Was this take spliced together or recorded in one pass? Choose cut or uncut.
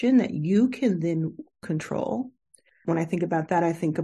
cut